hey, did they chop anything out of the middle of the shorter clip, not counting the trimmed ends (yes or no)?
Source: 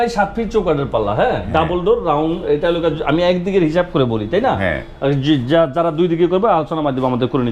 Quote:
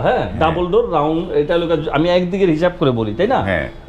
no